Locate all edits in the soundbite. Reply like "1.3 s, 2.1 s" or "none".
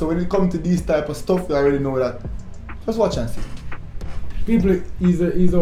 none